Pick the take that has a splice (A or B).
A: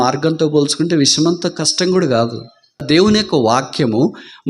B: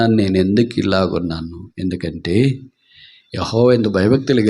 A